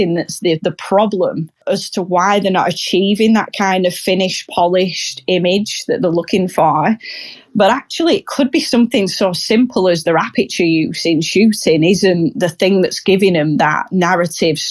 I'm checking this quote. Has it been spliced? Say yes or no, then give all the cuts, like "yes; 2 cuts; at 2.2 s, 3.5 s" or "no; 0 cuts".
yes; 1 cut; at 1.6 s